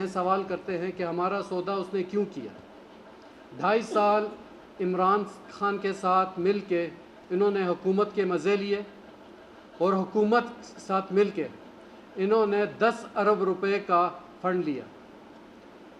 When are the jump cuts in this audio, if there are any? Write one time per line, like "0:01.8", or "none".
none